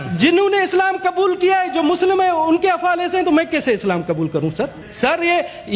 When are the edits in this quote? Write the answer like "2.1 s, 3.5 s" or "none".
4.8 s